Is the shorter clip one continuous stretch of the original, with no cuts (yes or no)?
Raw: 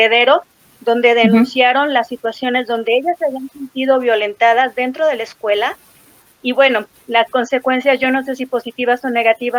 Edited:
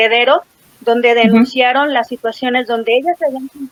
yes